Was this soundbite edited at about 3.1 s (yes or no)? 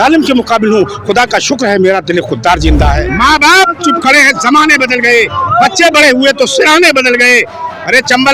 yes